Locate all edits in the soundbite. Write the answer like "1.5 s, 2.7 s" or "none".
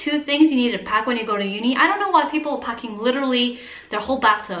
none